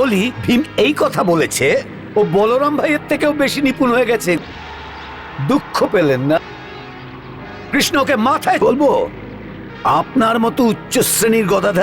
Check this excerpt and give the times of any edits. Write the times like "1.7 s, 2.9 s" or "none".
4.4 s, 6.4 s, 8.6 s